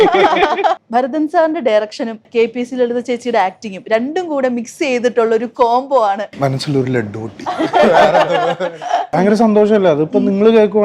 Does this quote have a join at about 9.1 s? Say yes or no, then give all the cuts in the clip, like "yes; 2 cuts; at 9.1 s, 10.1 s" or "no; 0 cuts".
yes; 4 cuts; at 0.8 s, 2.3 s, 6.3 s, 9.1 s